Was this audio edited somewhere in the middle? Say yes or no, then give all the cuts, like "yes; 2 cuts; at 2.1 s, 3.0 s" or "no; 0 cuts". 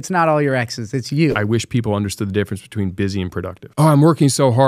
yes; 2 cuts; at 1.4 s, 3.6 s